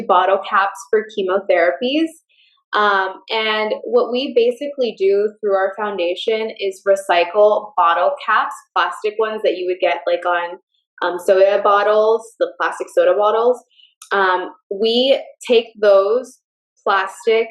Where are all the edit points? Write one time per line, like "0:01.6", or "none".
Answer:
none